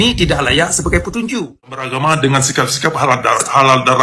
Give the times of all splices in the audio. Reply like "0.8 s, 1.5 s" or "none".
1.9 s